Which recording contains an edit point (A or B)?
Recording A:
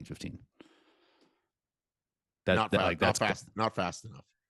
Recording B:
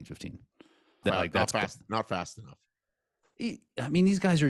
B